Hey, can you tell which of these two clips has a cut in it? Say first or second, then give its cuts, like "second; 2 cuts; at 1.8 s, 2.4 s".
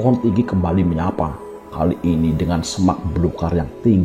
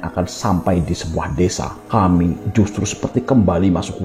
second; 1 cut; at 1.7 s